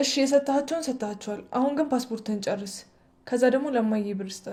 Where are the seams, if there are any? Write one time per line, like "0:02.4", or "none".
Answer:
none